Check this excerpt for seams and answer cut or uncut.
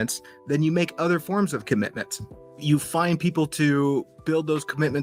uncut